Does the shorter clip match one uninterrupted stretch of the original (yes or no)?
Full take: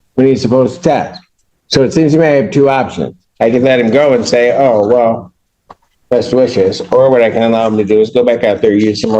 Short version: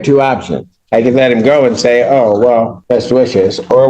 no